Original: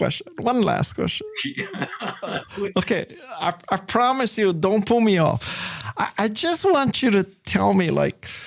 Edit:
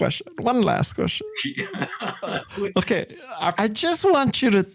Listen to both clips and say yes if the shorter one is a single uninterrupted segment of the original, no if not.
no